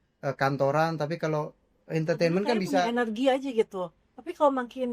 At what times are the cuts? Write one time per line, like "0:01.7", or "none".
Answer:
0:02.6